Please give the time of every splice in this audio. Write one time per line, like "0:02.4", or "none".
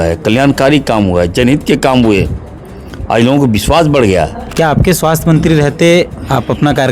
0:04.4